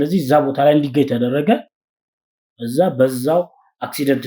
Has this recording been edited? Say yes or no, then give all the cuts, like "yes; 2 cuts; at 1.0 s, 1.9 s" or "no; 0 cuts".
no; 0 cuts